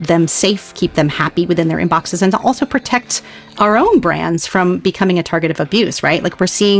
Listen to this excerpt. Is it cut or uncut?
uncut